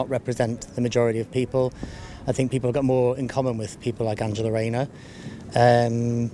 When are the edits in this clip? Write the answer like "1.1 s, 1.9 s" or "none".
none

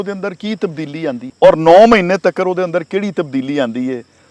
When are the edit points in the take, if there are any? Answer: 1.3 s

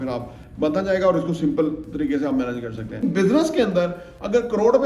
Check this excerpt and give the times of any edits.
3.0 s

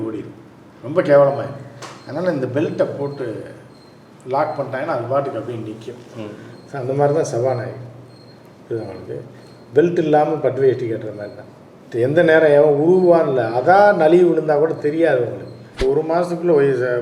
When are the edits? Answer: 15.8 s

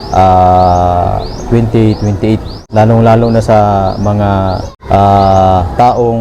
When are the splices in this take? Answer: 2.6 s, 4.7 s

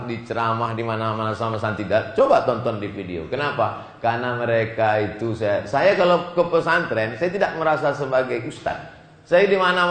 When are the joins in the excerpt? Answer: none

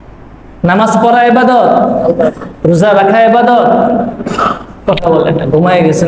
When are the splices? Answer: none

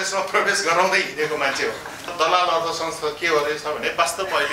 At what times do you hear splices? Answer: 2.1 s

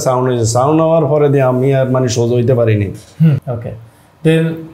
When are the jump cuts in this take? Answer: 3.4 s

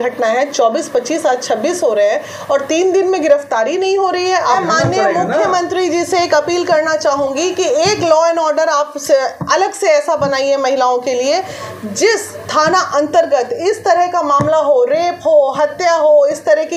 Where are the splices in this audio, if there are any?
4.6 s

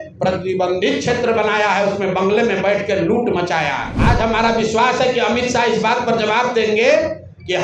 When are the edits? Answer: 3.9 s

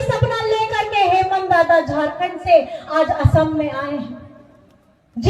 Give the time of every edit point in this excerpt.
none

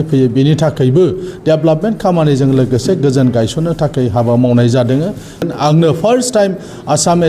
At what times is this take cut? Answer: 5.4 s

